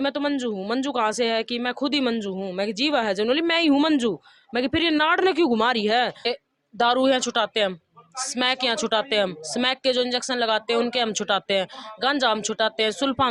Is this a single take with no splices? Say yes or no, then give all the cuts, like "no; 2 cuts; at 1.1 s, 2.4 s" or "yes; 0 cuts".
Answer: no; 1 cut; at 6.3 s